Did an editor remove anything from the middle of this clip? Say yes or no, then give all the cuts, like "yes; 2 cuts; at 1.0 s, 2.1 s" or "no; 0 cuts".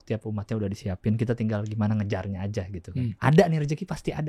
no; 0 cuts